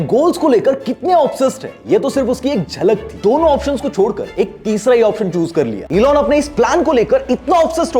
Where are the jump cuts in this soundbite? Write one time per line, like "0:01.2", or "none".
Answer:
0:03.2
0:05.8